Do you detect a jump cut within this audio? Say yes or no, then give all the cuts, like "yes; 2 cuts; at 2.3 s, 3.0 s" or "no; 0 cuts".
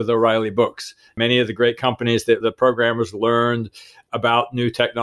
yes; 2 cuts; at 1.1 s, 2.4 s